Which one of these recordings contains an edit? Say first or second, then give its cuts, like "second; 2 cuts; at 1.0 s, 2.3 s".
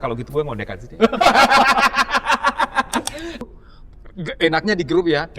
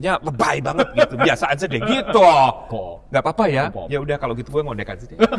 first; 1 cut; at 3.4 s